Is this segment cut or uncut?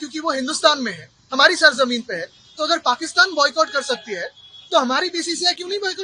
uncut